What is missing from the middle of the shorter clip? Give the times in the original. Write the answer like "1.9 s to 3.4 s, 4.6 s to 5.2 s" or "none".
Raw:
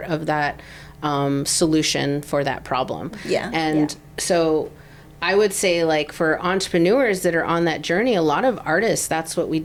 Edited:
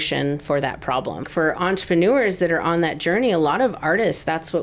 3.1 s to 6.1 s